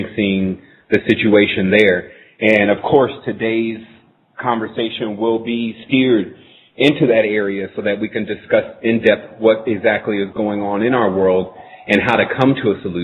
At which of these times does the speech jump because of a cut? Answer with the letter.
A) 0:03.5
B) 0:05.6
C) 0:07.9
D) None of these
D